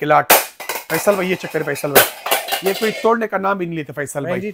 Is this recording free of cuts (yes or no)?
yes